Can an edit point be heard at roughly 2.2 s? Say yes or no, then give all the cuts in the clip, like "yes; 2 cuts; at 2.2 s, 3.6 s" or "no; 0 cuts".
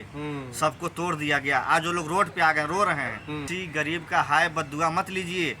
no; 1 cut; at 3.5 s